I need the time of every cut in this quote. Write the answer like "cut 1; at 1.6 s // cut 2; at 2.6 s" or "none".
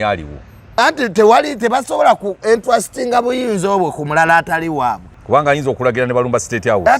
cut 1; at 5.1 s